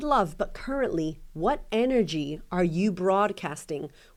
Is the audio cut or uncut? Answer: uncut